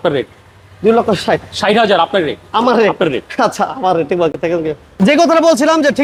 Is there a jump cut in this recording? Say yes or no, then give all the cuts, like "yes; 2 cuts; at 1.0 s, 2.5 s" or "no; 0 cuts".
no; 0 cuts